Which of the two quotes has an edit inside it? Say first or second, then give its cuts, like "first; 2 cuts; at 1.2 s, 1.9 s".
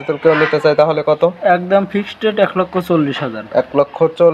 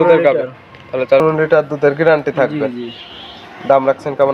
second; 1 cut; at 1.2 s